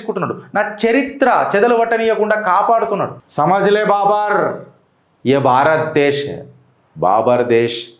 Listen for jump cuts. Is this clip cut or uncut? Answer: cut